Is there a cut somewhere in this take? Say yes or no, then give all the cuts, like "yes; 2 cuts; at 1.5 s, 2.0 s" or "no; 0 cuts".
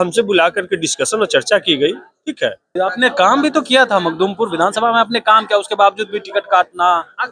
yes; 1 cut; at 2.7 s